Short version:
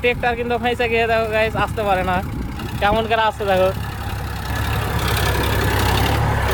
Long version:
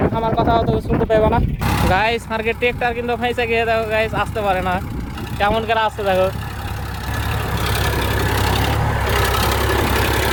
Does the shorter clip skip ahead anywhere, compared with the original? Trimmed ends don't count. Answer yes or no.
no